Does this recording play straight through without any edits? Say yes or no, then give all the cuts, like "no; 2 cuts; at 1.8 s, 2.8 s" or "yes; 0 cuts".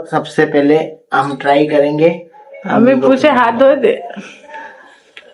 yes; 0 cuts